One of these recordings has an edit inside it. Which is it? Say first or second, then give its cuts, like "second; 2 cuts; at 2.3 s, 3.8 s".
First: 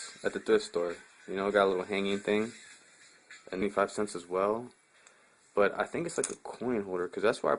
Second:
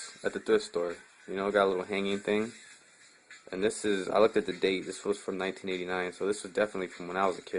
second; 1 cut; at 3.5 s